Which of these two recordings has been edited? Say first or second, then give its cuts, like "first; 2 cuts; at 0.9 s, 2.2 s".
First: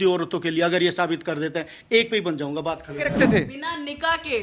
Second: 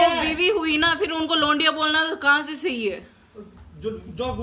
first; 1 cut; at 3.1 s